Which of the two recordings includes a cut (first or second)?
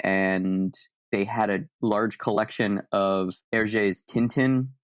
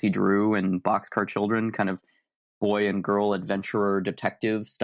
first